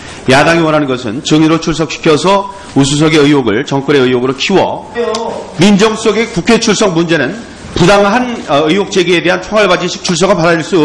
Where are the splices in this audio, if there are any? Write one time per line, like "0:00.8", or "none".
none